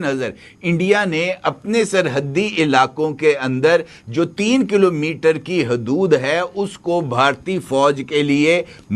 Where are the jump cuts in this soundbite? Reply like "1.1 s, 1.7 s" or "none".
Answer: none